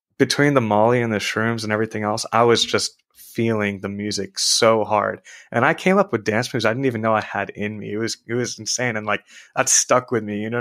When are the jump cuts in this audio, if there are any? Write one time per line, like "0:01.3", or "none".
none